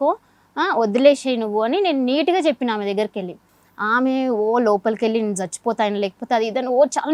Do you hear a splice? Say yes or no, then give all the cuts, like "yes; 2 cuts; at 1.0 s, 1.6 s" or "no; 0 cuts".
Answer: no; 0 cuts